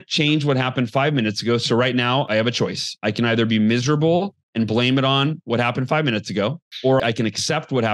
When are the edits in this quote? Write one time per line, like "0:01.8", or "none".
0:02.3
0:07.0